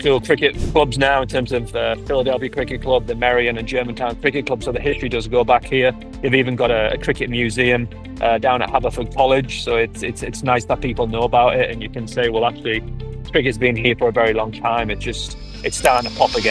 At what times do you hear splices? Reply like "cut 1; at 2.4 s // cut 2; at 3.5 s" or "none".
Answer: none